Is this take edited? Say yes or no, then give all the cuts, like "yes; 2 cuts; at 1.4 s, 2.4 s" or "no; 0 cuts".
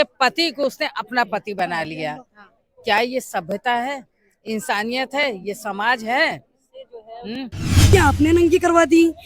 yes; 1 cut; at 7.9 s